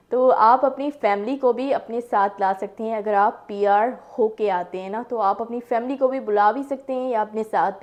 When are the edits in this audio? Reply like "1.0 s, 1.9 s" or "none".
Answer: none